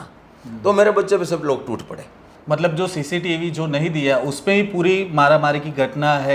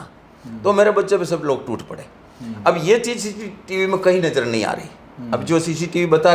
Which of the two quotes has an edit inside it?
first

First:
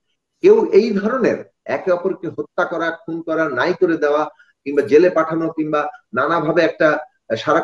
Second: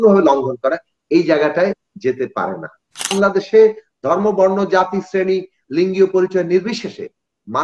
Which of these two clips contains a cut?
second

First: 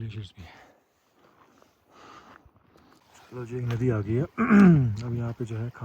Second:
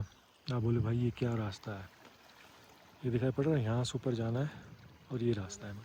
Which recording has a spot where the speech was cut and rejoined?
first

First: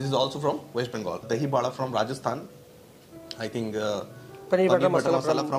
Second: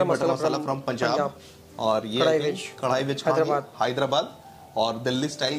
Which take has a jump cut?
first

